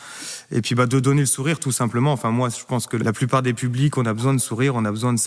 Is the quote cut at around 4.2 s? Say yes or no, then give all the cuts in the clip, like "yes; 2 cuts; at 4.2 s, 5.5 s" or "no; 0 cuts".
no; 1 cut; at 3.0 s